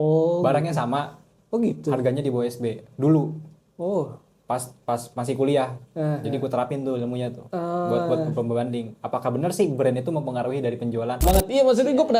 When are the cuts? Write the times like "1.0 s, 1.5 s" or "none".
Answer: 11.2 s